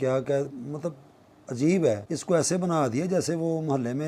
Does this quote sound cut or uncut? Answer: cut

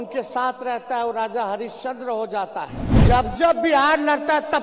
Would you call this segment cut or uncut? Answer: cut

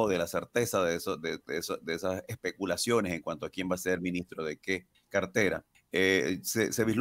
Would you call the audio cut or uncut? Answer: cut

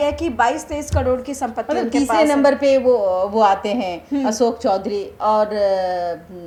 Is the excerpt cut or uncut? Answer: uncut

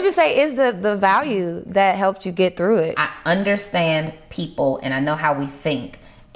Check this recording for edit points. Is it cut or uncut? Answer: cut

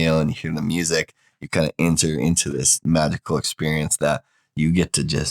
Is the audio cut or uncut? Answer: uncut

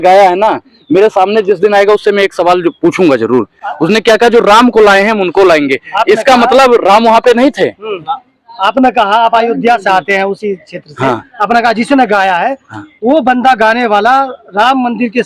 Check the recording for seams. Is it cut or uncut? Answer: uncut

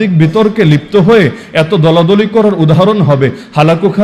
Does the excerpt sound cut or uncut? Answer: uncut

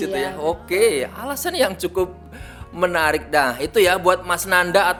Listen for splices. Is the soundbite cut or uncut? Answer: uncut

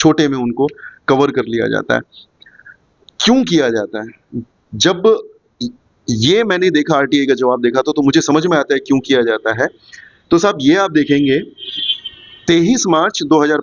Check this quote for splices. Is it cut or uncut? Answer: uncut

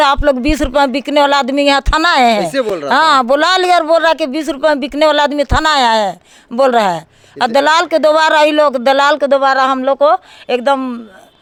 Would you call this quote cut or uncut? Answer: uncut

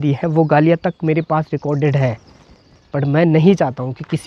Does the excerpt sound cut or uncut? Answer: uncut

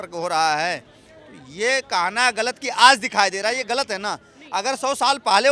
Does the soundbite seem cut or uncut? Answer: uncut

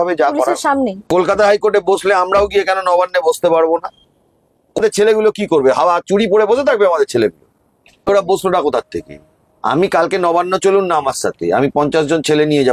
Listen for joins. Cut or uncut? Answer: cut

